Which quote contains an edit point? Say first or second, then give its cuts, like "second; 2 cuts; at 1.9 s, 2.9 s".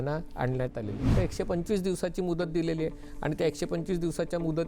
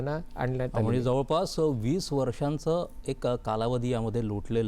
first; 1 cut; at 1.0 s